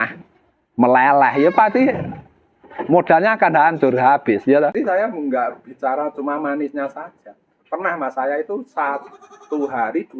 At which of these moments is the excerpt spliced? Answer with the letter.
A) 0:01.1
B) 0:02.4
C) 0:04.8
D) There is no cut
C